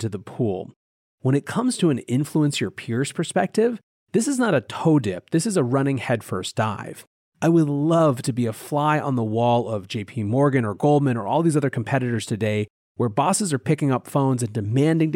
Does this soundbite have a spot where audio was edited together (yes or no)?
yes